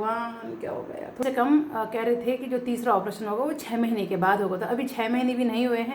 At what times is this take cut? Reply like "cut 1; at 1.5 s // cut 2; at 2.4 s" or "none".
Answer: cut 1; at 1.2 s